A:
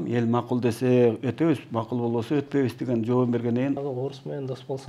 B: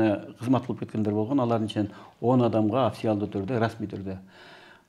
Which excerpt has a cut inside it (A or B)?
A